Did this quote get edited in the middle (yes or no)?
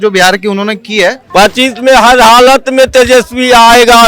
yes